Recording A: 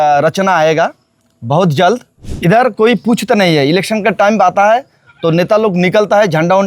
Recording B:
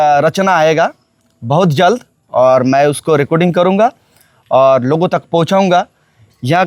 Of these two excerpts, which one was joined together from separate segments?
A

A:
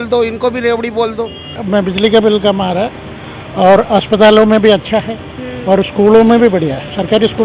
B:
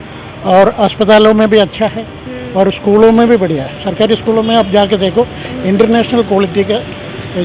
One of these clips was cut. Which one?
A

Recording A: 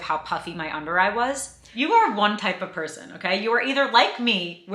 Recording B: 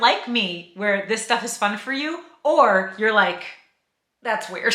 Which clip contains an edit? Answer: A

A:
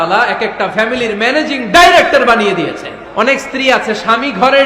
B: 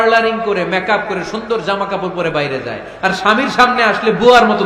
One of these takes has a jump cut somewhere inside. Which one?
A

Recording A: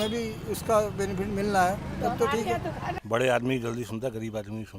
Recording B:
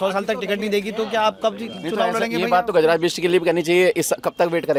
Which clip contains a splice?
A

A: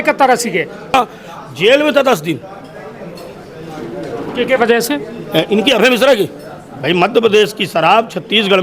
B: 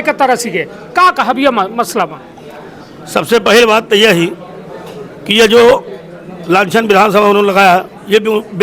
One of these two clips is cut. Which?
A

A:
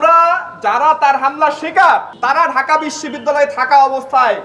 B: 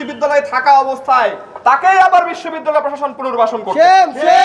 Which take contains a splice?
A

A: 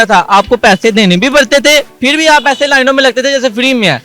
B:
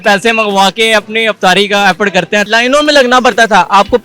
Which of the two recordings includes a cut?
B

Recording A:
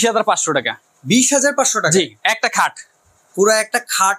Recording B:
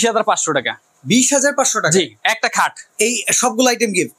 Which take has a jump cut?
B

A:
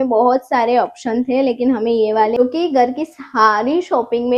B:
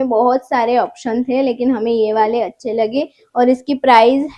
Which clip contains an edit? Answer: A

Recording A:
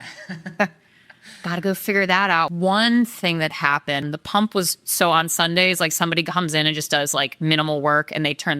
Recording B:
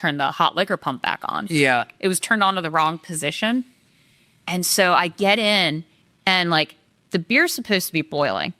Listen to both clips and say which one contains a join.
A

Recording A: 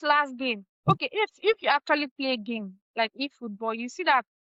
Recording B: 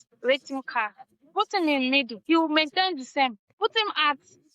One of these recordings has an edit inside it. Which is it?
B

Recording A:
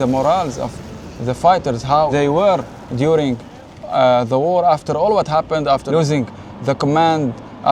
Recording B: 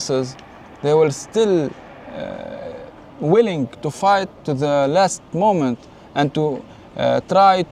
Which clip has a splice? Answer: A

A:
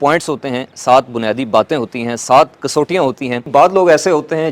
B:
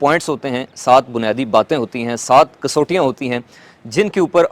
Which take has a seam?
A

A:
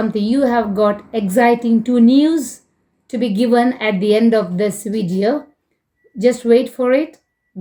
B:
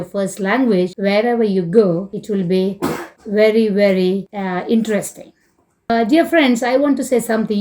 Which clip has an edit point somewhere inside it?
B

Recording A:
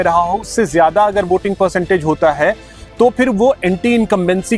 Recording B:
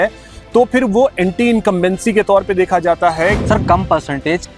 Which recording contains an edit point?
B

